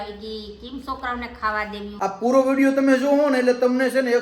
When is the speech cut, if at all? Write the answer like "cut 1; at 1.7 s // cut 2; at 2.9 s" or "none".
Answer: cut 1; at 1.9 s